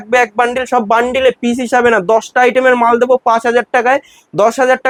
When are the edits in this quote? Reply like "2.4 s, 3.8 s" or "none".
none

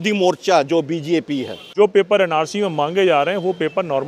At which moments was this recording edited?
1.6 s

